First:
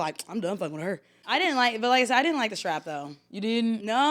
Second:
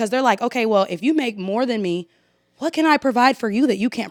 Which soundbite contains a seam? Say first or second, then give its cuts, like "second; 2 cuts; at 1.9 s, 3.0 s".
first; 1 cut; at 1.2 s